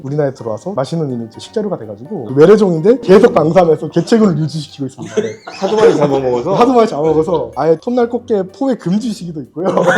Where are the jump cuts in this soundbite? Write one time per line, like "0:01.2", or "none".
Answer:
0:02.3
0:03.0
0:07.5